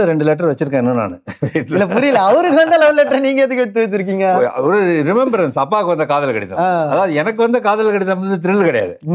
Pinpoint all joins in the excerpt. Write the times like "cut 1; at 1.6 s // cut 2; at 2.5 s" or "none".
none